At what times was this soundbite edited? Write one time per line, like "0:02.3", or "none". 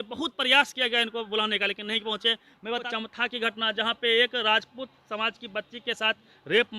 0:02.9

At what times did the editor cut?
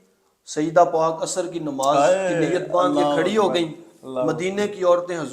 none

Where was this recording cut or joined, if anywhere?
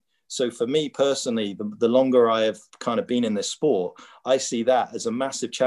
0:02.7

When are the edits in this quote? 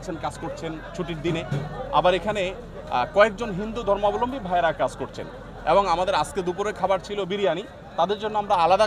none

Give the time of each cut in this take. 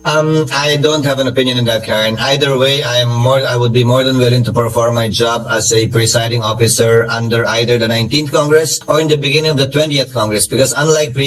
none

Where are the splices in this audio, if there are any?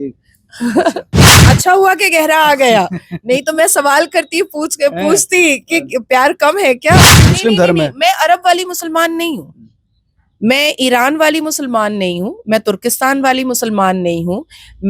0:01.3
0:07.3

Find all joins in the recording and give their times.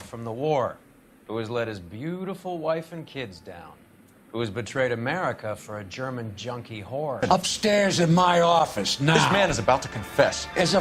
0:07.2

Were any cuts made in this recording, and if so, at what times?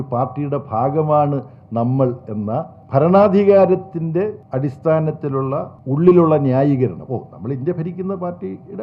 0:02.8
0:04.4
0:05.8

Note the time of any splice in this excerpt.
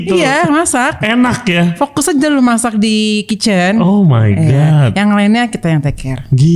none

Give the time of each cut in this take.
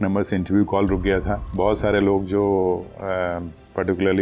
0:01.4

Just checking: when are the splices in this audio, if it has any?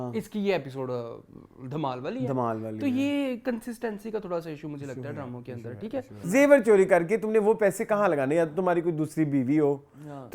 0:06.2

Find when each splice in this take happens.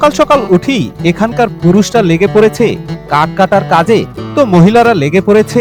none

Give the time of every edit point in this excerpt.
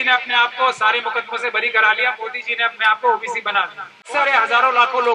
0:04.1

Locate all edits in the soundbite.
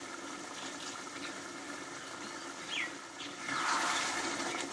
0:03.3

